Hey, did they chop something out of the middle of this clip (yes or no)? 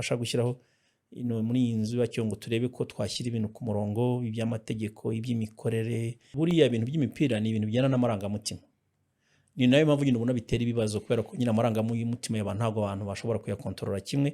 yes